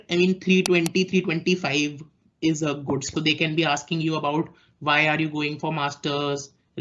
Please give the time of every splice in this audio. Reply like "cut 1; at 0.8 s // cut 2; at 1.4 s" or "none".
cut 1; at 3.1 s